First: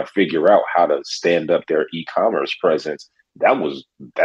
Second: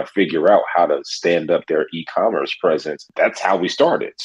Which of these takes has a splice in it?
second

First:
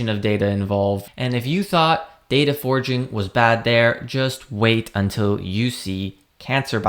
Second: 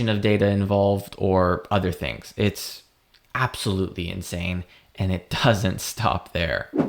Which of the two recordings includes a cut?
first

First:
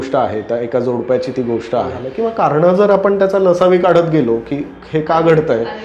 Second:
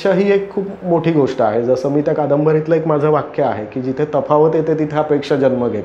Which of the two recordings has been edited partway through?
first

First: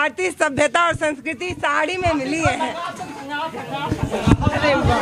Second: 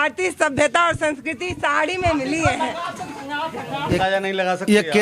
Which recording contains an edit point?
second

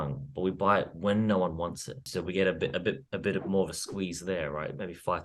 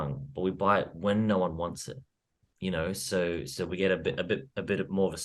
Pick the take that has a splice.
first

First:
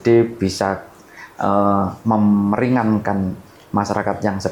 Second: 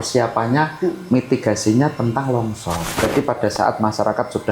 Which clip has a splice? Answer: second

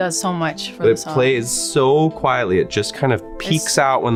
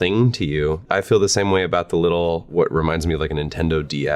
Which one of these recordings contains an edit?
second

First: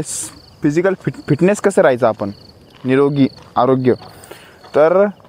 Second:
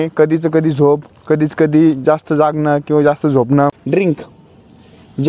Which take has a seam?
second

